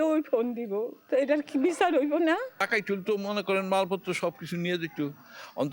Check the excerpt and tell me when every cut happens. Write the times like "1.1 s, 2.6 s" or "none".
1.0 s, 2.5 s